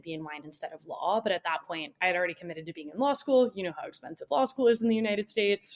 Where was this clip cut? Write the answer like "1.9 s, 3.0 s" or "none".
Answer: none